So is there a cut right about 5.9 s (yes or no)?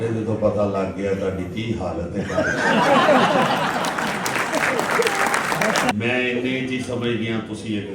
yes